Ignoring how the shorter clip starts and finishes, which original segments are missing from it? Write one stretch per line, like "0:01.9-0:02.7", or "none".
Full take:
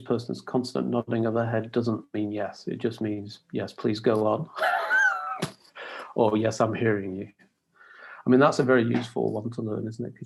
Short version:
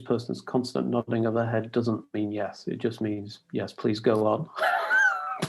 none